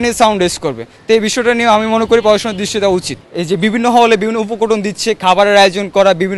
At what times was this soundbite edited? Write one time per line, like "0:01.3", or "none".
0:03.2